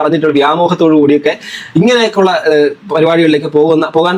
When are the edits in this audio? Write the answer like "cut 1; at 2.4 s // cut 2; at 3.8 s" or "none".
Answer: none